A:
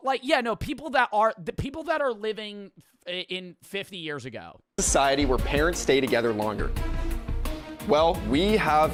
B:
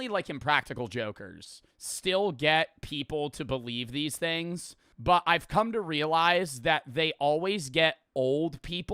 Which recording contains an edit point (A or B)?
B